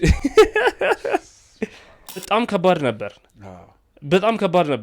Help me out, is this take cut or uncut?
cut